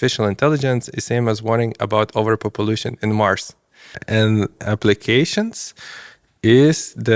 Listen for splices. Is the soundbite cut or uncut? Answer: cut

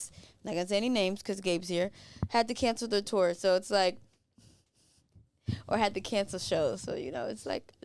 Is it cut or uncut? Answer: uncut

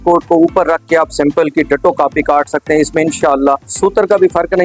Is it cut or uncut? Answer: cut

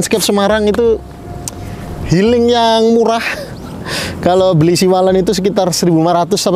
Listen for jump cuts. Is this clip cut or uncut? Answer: uncut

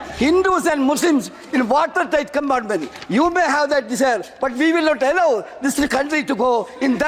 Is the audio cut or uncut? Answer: uncut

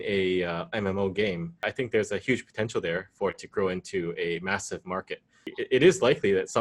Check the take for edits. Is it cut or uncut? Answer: cut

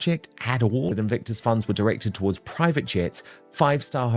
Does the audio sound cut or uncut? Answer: cut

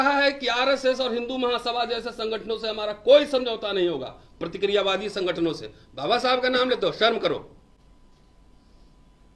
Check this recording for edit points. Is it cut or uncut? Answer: uncut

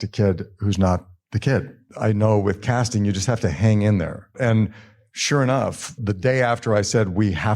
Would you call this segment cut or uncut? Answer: cut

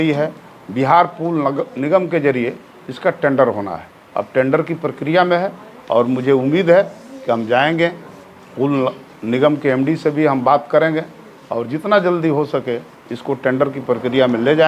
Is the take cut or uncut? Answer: uncut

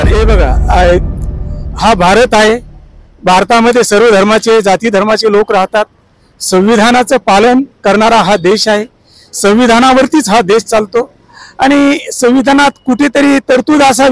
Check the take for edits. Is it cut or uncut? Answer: uncut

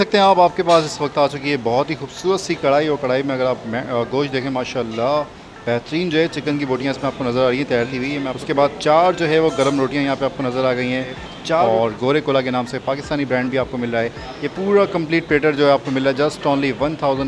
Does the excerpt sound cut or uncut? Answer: cut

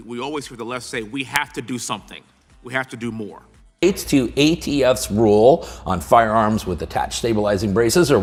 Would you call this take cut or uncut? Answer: uncut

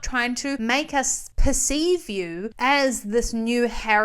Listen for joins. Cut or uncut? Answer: cut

